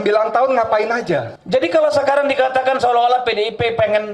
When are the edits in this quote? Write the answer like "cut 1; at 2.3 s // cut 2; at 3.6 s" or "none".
cut 1; at 1.3 s